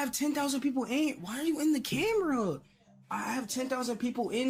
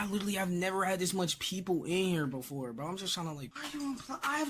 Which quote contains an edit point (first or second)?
second